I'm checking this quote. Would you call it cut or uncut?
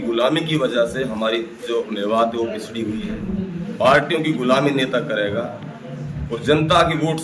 uncut